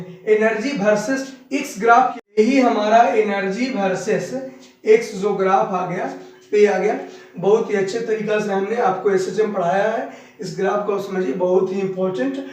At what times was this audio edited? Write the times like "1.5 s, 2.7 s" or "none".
2.4 s